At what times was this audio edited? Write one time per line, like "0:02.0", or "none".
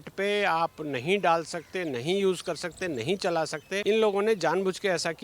0:03.8